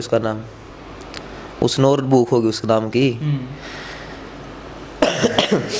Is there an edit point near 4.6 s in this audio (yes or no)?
no